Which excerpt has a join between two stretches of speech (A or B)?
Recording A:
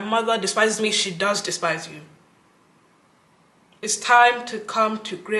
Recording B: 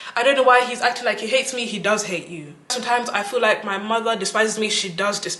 B